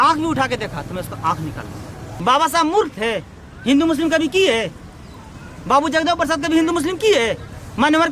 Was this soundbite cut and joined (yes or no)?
yes